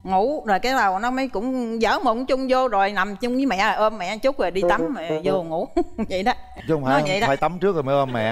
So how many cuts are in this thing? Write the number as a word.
zero